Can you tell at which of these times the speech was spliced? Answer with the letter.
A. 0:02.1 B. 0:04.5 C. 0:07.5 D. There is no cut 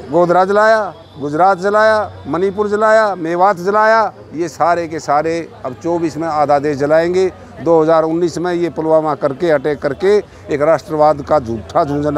D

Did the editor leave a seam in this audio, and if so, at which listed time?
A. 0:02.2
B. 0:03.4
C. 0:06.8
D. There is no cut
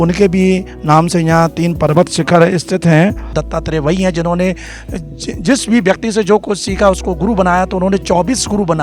B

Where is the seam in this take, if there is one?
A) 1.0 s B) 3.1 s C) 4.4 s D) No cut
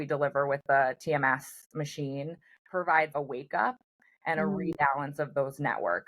B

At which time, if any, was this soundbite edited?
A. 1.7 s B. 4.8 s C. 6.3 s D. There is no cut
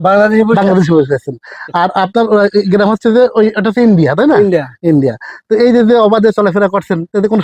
D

